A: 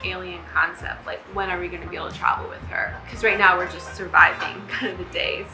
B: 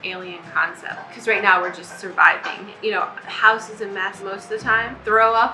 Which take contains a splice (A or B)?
B